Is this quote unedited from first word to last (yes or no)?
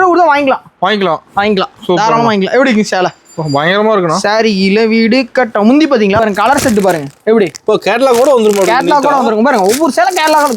no